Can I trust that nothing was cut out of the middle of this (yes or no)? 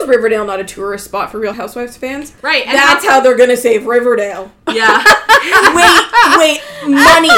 no